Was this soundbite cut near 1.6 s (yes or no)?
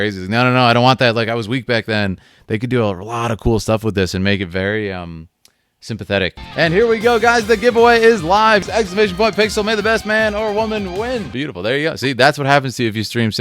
no